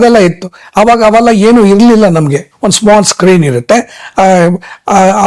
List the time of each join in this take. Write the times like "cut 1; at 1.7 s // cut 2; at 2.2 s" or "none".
cut 1; at 2.5 s